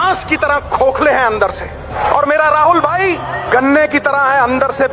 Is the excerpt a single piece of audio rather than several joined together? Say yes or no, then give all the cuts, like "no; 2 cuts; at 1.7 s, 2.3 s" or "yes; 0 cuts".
no; 2 cuts; at 2.0 s, 3.3 s